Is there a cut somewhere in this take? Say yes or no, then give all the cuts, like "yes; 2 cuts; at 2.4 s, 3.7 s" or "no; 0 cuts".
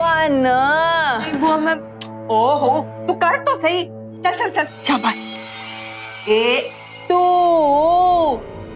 no; 0 cuts